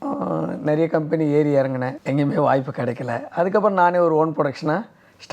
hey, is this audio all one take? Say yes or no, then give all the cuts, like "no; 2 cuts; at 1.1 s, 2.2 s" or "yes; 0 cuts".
no; 1 cut; at 1.9 s